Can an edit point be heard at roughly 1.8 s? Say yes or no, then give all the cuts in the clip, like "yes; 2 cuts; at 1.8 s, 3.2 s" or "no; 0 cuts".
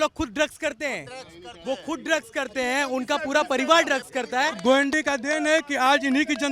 no; 1 cut; at 4.6 s